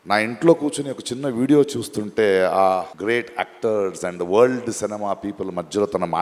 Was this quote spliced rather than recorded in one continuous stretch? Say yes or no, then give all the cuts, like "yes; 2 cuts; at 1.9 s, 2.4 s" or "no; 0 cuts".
yes; 1 cut; at 2.9 s